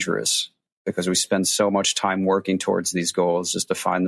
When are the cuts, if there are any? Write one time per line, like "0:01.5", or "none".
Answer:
none